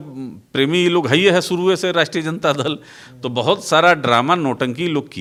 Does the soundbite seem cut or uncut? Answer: uncut